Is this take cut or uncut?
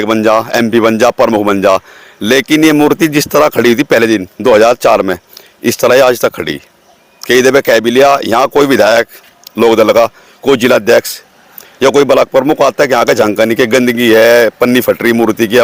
uncut